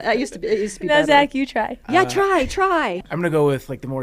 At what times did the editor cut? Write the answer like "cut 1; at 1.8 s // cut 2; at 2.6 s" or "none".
cut 1; at 1.8 s // cut 2; at 2.9 s